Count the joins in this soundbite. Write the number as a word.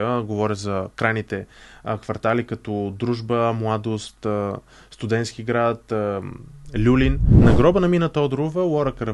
one